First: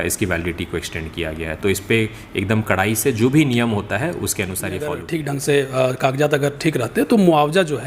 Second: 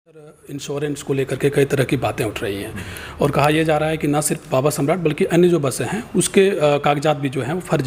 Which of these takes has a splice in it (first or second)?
first